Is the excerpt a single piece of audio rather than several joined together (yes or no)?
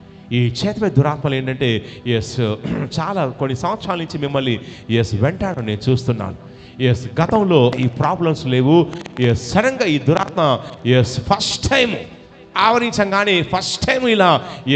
no